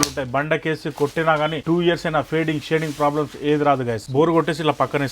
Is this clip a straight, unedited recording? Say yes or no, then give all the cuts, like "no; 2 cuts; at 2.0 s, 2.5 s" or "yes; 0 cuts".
no; 2 cuts; at 1.6 s, 4.0 s